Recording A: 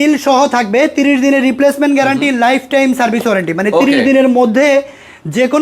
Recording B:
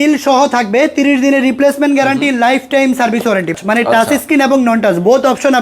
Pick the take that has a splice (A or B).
B